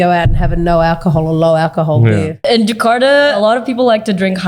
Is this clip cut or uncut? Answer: cut